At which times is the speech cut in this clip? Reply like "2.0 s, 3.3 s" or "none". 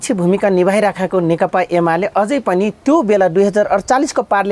none